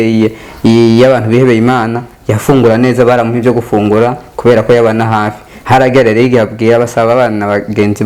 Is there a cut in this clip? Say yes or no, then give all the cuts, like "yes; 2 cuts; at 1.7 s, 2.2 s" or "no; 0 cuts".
no; 0 cuts